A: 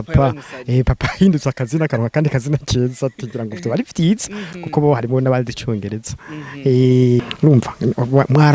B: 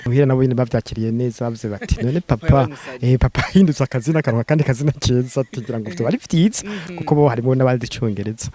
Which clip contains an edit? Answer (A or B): A